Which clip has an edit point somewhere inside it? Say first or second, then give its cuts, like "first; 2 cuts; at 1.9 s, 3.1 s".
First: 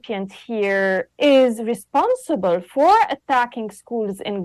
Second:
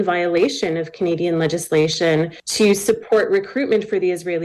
second; 1 cut; at 2.4 s